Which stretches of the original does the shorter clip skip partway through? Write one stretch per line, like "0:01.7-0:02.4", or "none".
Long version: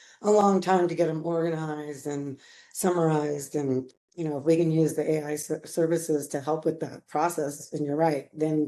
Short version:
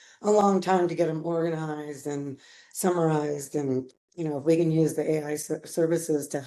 none